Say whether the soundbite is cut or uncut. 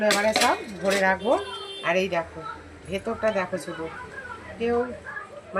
uncut